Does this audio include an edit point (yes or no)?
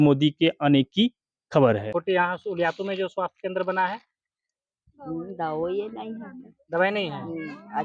yes